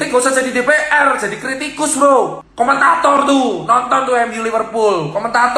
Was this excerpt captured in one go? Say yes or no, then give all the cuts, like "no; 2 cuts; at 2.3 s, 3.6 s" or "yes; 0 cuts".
yes; 0 cuts